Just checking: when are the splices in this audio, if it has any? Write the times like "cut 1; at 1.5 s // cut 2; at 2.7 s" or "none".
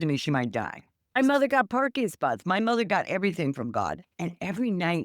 cut 1; at 4.1 s